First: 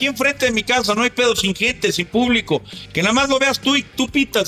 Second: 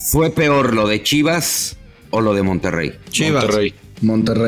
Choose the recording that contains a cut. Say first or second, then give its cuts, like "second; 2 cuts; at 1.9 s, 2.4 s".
second; 1 cut; at 3.4 s